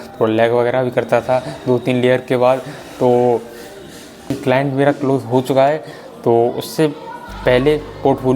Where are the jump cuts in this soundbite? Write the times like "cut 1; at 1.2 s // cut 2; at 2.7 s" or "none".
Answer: cut 1; at 4.3 s